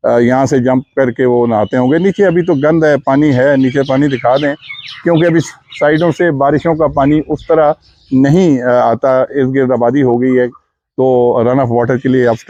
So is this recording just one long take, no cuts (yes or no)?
yes